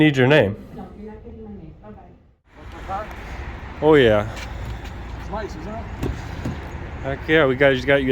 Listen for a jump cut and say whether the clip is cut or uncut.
cut